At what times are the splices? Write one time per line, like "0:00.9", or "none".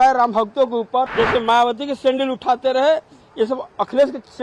0:01.1